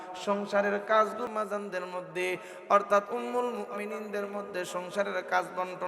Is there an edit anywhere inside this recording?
yes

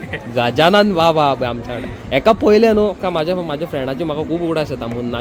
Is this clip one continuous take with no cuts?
yes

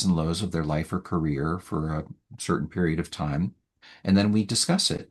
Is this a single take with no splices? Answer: yes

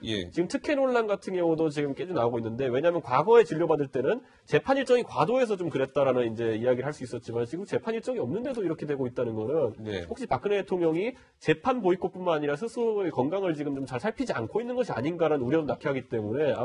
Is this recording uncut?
yes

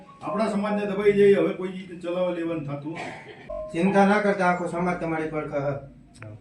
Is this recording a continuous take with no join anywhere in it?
no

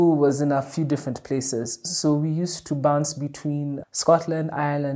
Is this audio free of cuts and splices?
yes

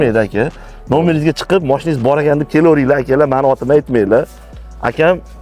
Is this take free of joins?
yes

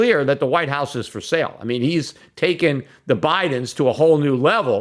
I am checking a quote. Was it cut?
no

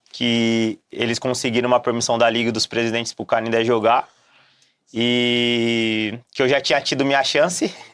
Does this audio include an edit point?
no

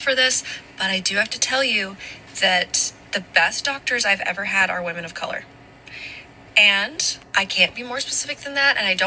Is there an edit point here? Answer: no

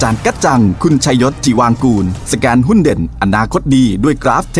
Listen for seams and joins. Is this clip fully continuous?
yes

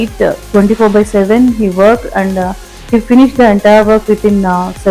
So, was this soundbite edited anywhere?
no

